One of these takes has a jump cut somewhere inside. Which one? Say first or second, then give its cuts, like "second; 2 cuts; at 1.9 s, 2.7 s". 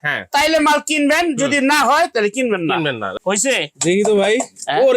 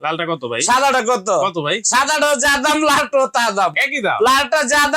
first; 1 cut; at 3.1 s